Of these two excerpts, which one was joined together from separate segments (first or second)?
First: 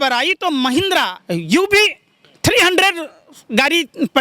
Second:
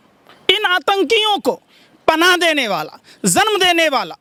first